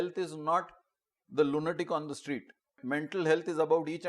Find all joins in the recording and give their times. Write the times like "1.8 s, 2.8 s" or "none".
2.7 s